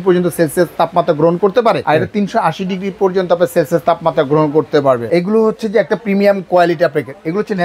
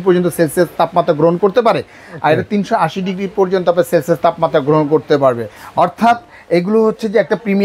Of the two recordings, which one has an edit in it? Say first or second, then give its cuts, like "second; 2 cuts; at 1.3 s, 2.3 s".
first; 2 cuts; at 1.8 s, 5.0 s